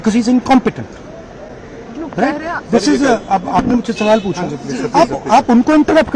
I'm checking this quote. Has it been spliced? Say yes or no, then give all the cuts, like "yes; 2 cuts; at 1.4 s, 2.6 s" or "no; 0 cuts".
no; 0 cuts